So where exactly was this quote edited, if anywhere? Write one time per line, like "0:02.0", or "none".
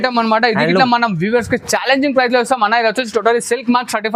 none